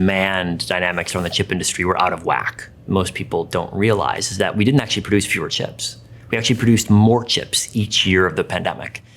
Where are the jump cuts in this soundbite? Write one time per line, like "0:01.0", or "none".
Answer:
0:02.8